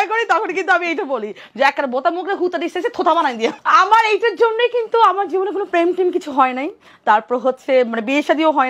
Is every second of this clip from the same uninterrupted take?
no; 1 cut; at 3.6 s

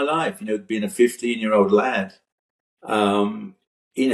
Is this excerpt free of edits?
yes; 0 cuts

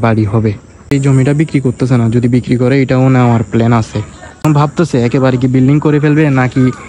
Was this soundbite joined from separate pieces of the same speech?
yes; 2 cuts; at 0.9 s, 4.4 s

